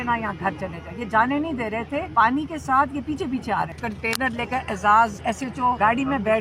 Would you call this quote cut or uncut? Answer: cut